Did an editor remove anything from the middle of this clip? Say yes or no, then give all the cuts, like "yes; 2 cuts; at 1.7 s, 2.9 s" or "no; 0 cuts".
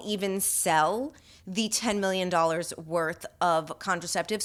no; 0 cuts